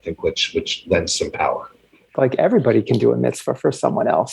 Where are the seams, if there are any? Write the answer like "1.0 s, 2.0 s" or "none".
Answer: 2.0 s